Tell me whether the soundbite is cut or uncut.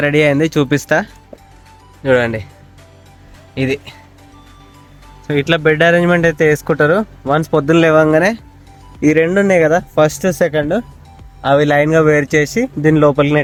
uncut